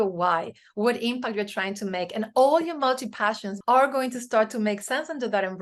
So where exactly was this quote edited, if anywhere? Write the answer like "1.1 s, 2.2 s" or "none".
3.5 s